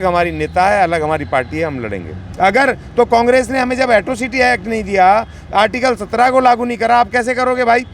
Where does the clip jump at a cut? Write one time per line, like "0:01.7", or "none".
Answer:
0:02.2

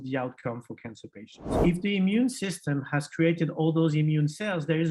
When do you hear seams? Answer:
0:01.6

